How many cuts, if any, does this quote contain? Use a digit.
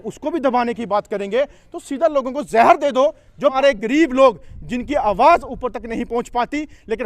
1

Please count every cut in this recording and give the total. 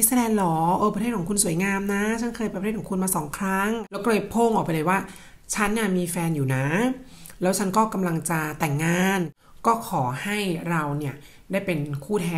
2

